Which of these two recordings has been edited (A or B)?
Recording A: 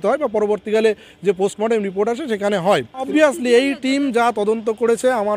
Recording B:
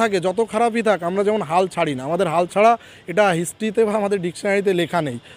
A